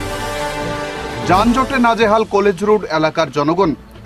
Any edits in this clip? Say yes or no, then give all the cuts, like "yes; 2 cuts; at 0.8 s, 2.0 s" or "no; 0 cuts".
no; 0 cuts